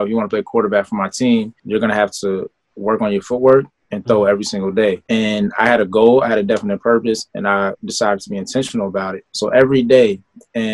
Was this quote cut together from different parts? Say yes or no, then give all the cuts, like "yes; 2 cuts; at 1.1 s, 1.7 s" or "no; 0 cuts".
yes; 3 cuts; at 1.6 s, 5.0 s, 9.2 s